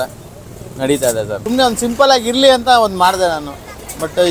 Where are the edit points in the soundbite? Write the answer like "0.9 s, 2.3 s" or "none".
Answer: 1.4 s